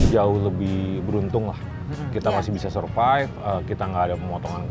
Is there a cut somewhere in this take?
no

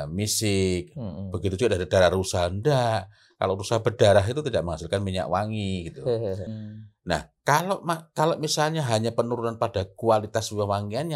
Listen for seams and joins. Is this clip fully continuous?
no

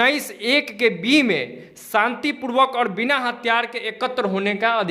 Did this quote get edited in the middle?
no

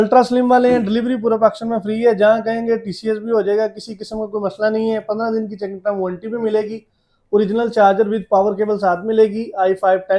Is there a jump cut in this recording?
no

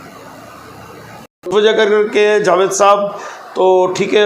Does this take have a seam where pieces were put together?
yes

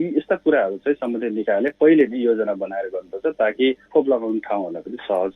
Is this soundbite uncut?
no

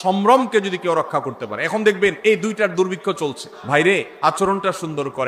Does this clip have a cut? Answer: yes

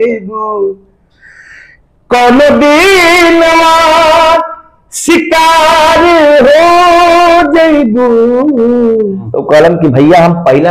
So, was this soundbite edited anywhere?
yes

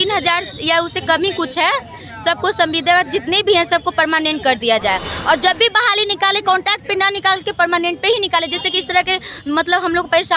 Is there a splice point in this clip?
no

